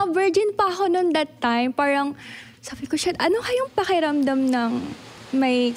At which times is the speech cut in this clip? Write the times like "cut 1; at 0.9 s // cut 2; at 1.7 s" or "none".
none